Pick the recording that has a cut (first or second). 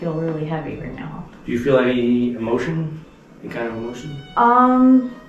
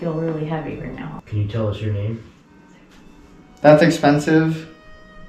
second